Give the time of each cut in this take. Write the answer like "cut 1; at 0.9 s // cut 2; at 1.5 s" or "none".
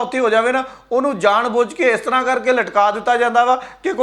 none

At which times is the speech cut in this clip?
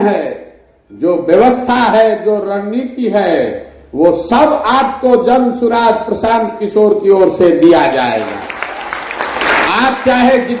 cut 1; at 9.6 s

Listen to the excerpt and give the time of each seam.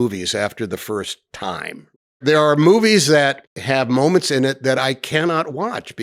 cut 1; at 2.2 s // cut 2; at 3.5 s

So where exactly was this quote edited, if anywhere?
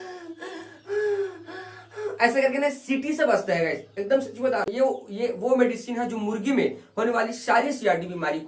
cut 1; at 4.7 s

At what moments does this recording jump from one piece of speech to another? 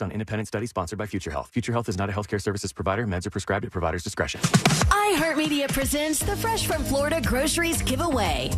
cut 1; at 4.4 s

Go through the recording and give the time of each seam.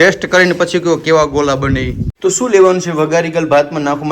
cut 1; at 2.0 s

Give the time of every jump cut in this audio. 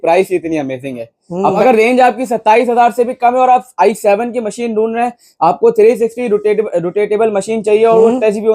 cut 1; at 1.6 s

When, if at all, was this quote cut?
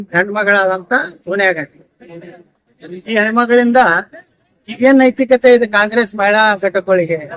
none

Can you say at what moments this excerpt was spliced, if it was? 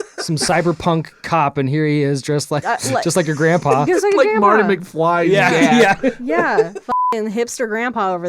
cut 1; at 2.6 s // cut 2; at 6.9 s

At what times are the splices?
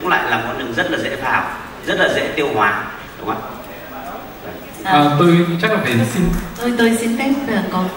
none

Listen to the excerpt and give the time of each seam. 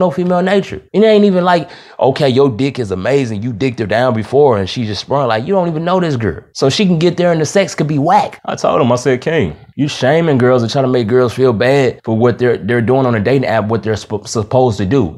cut 1; at 8.4 s

